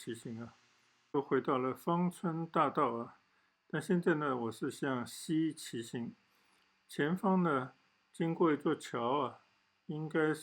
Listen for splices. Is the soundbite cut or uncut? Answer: cut